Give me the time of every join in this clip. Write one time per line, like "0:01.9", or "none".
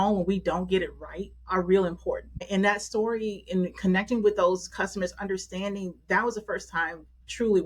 0:02.4